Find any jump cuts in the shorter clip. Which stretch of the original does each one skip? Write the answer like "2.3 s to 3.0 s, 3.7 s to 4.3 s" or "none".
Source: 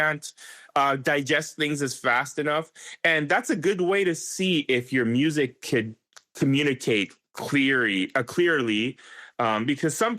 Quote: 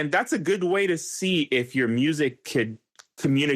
none